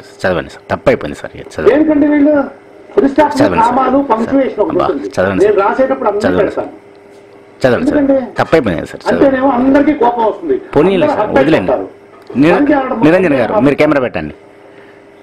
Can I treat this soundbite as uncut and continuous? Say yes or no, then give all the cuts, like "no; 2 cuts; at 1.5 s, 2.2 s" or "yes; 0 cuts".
yes; 0 cuts